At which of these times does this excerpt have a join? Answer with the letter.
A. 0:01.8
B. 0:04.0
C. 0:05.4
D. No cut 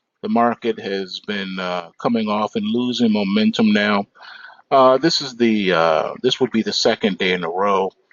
B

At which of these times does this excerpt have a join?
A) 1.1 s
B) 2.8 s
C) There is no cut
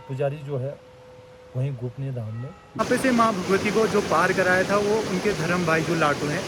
B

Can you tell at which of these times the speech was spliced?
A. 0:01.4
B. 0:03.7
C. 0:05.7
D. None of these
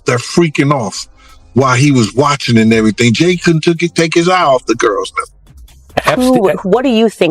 C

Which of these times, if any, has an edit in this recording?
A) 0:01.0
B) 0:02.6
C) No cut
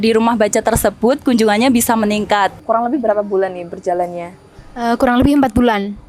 B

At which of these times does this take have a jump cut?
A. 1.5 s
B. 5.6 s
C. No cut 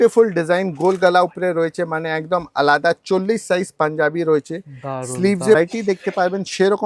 B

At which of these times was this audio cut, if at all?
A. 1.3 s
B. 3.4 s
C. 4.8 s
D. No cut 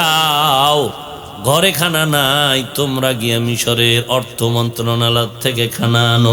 D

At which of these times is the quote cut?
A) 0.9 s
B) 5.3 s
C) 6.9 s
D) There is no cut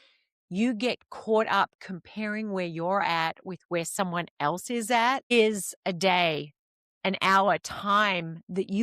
B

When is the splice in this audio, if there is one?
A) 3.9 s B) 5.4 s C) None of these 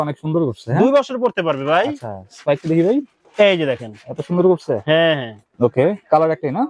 B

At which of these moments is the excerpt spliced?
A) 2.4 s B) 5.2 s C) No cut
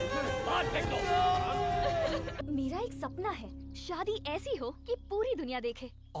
A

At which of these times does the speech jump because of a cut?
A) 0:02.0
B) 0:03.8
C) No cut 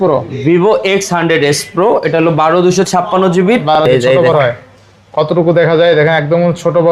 B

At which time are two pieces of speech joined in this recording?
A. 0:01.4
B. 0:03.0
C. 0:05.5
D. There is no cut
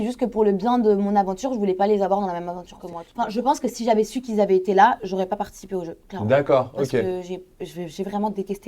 B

